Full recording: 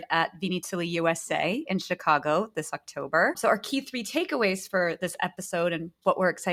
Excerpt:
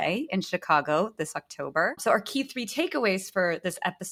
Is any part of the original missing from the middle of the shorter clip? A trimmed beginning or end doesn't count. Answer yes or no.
no